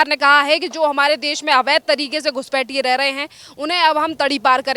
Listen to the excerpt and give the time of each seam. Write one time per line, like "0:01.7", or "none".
none